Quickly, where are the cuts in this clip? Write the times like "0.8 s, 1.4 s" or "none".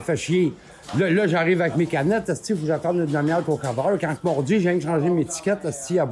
none

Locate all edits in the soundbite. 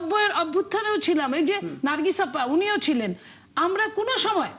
none

